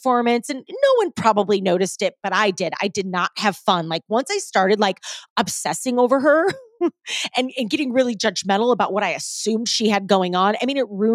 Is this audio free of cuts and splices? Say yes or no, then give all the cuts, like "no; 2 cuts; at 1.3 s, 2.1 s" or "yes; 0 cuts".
yes; 0 cuts